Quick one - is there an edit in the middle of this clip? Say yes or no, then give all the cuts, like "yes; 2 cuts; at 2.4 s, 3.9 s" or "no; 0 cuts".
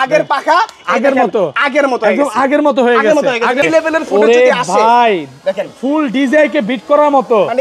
yes; 1 cut; at 3.6 s